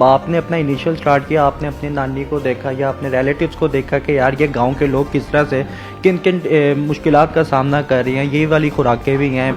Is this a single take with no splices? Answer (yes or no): yes